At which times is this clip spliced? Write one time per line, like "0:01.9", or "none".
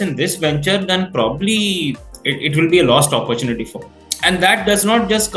0:04.0